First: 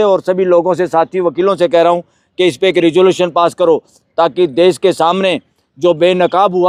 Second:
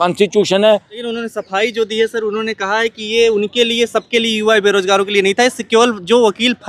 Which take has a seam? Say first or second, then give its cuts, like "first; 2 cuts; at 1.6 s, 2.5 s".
second; 1 cut; at 1.0 s